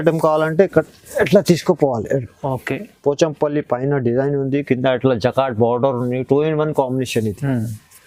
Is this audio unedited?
yes; 0 cuts

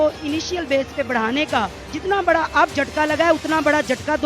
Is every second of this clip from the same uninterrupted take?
no; 1 cut; at 1.8 s

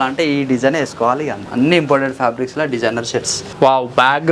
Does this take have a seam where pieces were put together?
yes; 2 cuts; at 1.4 s, 3.4 s

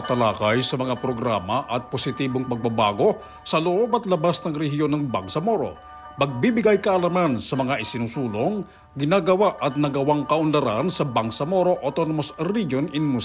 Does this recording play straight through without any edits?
yes; 0 cuts

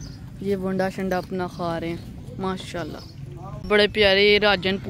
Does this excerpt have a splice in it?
no; 0 cuts

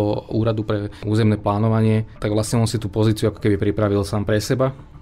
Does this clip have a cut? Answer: yes; 1 cut; at 2.1 s

